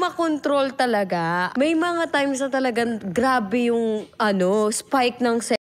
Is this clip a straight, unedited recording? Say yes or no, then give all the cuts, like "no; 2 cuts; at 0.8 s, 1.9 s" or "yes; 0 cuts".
no; 1 cut; at 1.5 s